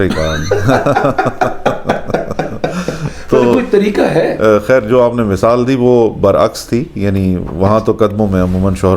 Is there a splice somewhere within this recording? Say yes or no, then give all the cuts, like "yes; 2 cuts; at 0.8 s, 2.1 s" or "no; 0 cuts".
no; 0 cuts